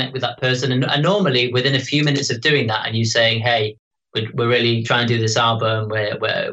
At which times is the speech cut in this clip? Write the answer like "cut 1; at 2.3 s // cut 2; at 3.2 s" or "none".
cut 1; at 4.8 s